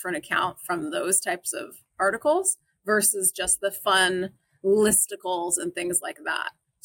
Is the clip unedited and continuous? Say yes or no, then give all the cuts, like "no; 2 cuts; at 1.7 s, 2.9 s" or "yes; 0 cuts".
yes; 0 cuts